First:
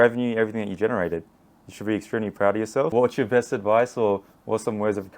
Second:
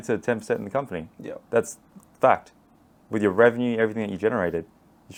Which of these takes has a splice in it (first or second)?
first